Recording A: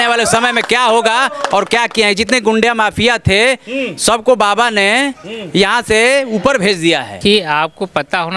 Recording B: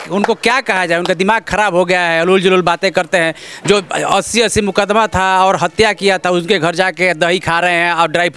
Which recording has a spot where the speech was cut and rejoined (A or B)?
A